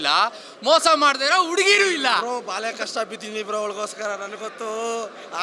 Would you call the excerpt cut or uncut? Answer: uncut